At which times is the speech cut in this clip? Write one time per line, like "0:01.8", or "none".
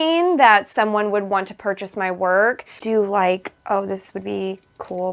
0:02.8